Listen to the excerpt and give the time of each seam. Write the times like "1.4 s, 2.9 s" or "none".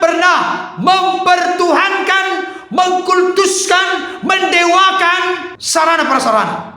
5.5 s